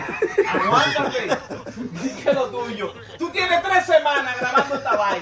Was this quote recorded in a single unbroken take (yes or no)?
yes